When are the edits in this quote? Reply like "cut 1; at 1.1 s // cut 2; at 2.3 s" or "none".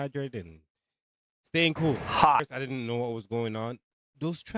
cut 1; at 2.5 s